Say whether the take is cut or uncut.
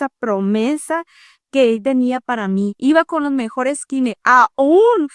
uncut